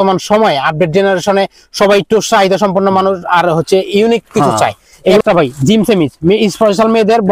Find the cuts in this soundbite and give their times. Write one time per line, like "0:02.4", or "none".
0:05.2